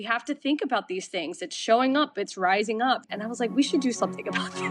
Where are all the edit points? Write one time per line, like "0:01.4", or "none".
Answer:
0:03.1